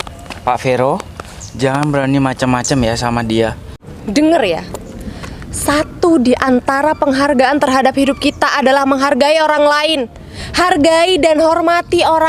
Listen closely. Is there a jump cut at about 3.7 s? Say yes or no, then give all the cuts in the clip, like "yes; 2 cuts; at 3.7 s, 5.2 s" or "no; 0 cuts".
yes; 1 cut; at 3.7 s